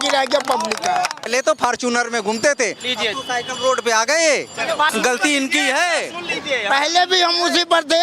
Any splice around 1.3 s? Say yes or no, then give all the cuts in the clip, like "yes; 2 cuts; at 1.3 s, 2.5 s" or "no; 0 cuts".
yes; 2 cuts; at 1.3 s, 4.9 s